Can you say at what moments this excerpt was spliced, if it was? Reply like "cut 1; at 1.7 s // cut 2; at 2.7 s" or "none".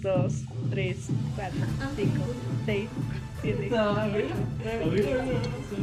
none